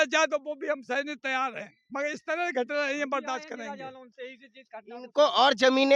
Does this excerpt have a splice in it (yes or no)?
no